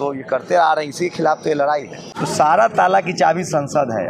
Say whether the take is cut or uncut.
cut